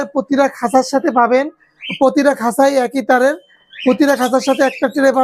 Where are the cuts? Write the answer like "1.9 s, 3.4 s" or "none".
none